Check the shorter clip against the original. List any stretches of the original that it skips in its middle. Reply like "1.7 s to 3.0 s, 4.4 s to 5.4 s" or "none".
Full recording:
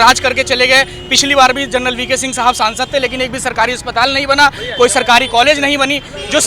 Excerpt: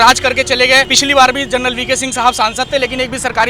0.9 s to 1.1 s